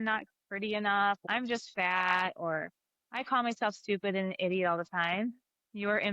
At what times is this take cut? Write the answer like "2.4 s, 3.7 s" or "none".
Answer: 1.3 s